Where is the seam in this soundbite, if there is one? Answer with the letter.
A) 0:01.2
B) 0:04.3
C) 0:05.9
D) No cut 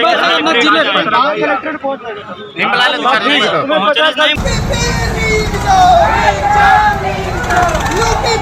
B